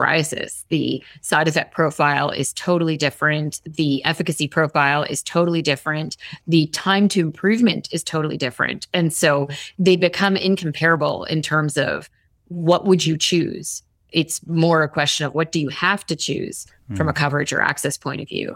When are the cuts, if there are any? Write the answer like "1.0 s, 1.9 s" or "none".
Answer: none